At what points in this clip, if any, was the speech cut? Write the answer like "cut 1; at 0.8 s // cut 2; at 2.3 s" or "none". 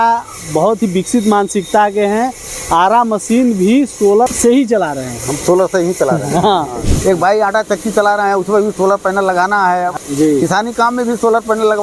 cut 1; at 6.9 s // cut 2; at 9.9 s